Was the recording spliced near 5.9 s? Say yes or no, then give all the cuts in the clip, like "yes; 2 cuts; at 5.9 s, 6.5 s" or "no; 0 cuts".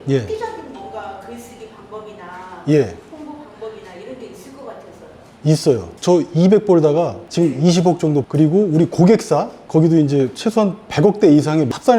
yes; 1 cut; at 5.9 s